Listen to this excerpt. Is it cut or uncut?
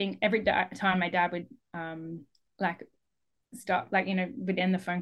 uncut